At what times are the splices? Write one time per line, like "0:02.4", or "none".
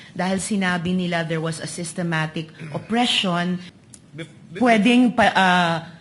0:03.8

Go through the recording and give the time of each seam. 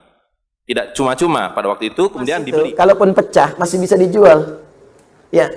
0:02.5

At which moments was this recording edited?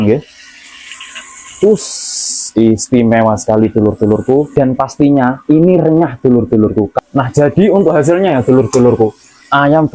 0:04.5
0:06.9

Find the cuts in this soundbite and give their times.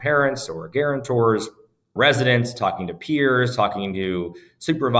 none

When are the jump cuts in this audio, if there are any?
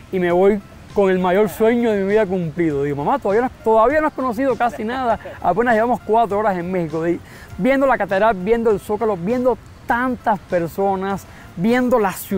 none

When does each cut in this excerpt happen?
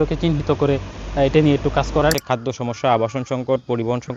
0:02.2

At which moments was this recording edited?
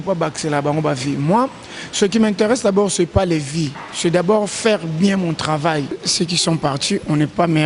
0:06.0

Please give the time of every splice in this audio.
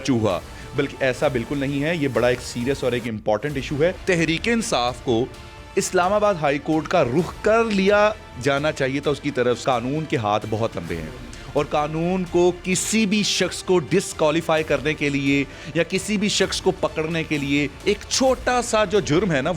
0:04.0
0:09.6

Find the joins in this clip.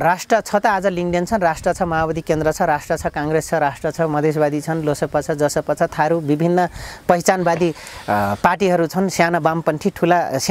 none

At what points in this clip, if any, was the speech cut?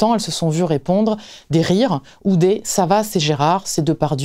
none

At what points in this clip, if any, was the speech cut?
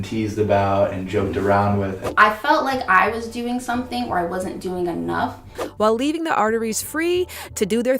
0:02.0
0:05.6

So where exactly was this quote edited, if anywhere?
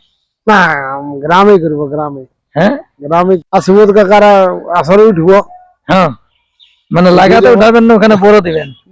0:03.4

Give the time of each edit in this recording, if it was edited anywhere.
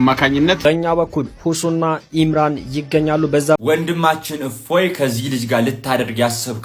0:03.6

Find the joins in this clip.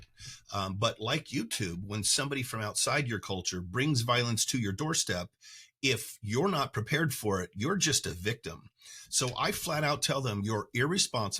none

